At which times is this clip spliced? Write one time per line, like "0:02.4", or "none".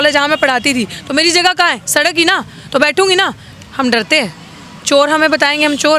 0:03.5